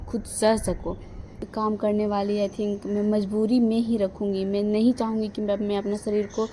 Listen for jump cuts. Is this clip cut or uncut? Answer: cut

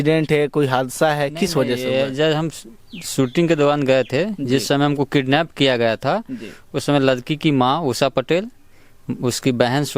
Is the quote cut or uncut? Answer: uncut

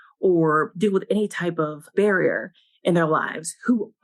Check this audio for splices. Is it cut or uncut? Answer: uncut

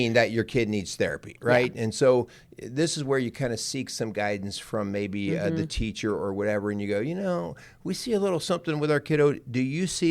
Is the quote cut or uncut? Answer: uncut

